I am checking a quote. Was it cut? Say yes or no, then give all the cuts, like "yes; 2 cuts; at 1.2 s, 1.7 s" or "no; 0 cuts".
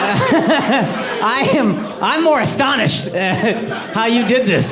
no; 0 cuts